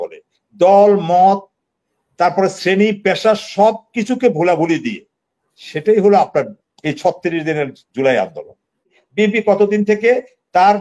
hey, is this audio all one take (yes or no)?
no